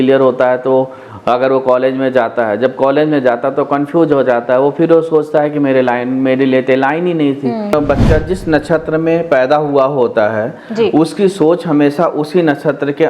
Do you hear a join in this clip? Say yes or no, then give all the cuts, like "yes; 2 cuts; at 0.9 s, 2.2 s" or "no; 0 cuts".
yes; 1 cut; at 7.7 s